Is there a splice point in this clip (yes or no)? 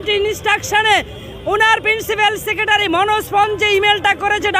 no